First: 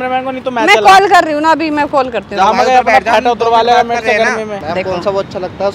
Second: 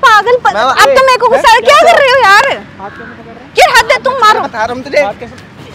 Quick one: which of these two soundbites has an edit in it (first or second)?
first